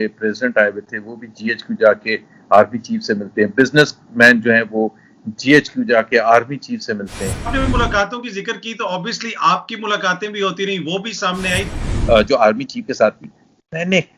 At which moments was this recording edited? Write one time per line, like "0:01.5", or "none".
0:07.5
0:11.7